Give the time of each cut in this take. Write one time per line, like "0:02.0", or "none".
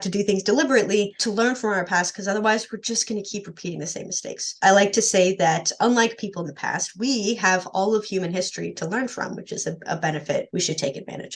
0:01.2
0:04.4
0:10.5